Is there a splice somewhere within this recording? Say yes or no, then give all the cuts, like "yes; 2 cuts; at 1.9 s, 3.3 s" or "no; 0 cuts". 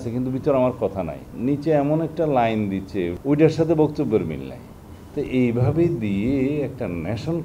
yes; 2 cuts; at 1.3 s, 3.1 s